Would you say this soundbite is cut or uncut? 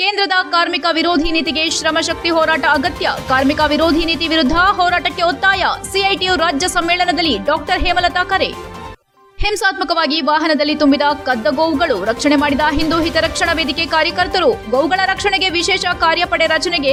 uncut